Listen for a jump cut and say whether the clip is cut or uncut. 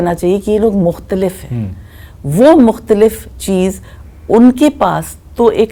uncut